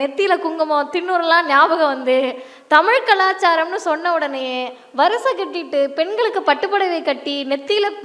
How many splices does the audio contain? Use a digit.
0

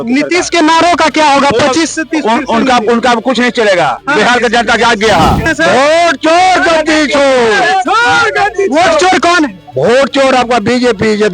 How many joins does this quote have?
1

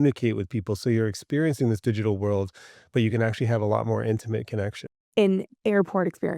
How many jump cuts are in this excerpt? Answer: 1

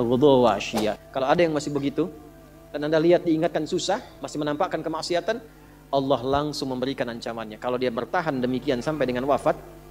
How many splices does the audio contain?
1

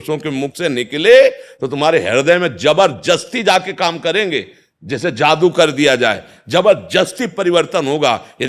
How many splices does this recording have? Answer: 0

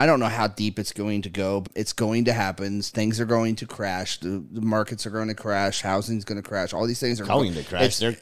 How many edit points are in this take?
1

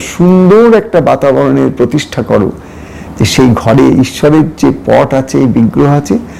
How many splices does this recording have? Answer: 0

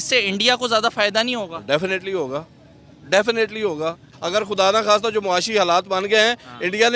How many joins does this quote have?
1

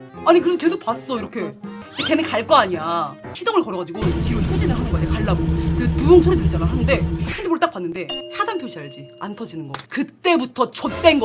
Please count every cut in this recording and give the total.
0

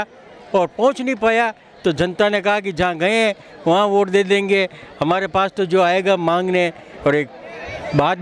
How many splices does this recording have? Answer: 0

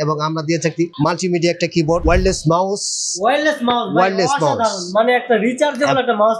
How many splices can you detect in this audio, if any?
2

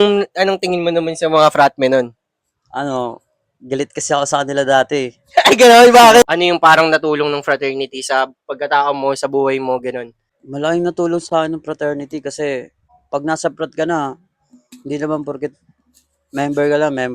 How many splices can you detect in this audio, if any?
1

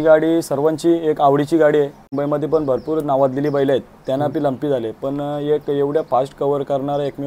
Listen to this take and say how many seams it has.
1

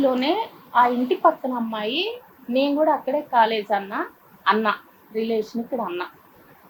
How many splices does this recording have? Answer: 0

